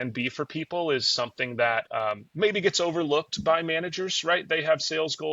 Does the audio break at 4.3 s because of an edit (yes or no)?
no